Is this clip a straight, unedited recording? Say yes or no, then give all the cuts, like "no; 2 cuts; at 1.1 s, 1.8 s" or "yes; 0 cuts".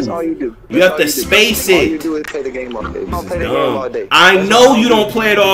no; 1 cut; at 3.1 s